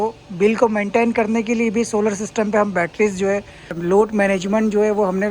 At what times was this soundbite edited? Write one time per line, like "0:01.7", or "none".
0:03.8